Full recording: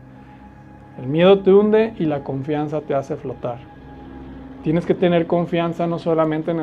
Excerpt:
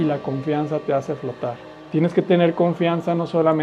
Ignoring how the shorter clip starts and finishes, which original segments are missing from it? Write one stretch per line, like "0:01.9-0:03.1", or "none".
0:03.7-0:04.4

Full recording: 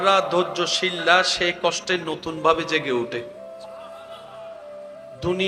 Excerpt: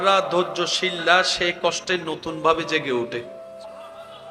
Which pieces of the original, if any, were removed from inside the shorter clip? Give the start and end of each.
0:03.2-0:03.4

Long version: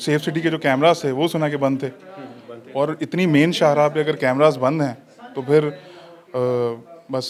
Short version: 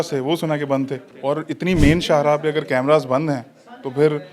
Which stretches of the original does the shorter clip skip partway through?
0:02.0-0:02.6

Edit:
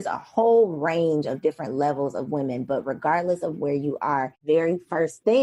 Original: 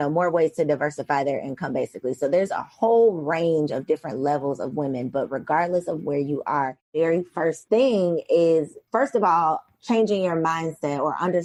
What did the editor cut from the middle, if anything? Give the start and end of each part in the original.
none

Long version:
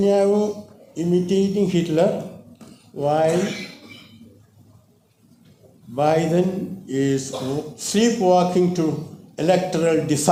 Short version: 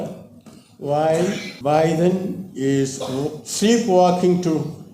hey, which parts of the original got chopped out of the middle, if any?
0:03.6-0:05.8

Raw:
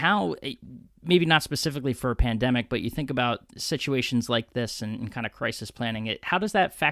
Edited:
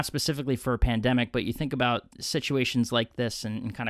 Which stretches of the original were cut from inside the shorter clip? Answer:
none

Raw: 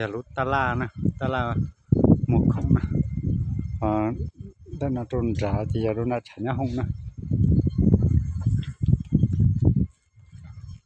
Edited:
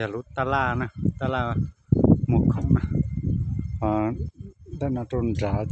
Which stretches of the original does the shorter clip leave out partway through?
none

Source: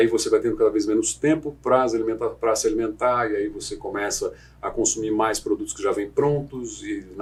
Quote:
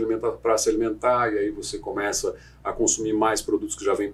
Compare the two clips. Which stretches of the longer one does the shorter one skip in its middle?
none

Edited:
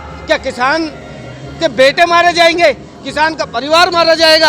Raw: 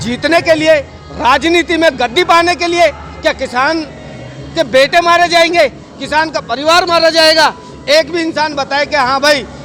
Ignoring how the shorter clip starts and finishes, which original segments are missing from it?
none

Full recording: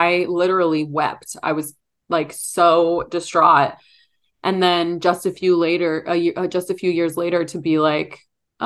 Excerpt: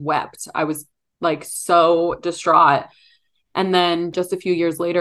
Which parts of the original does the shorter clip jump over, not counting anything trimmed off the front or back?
0:05.0-0:06.5

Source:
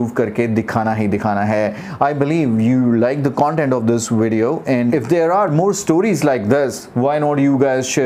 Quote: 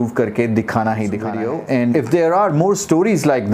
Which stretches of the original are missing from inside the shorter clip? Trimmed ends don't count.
0:01.3-0:04.3

